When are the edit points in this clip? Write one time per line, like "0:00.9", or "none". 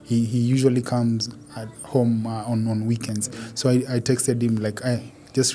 none